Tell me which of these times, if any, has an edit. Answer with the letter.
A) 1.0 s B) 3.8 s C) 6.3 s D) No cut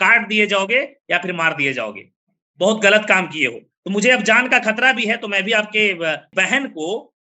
C